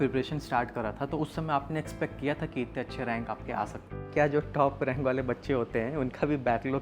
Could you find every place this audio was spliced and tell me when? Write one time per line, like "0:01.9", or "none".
0:04.0